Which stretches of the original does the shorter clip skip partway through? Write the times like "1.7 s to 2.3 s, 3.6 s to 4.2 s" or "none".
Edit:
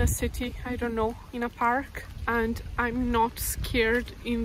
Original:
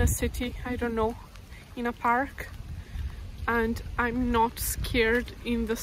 1.2 s to 1.7 s, 2.5 s to 3.2 s